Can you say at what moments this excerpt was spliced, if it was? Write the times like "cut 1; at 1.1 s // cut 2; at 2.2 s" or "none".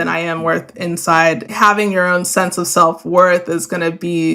cut 1; at 1.5 s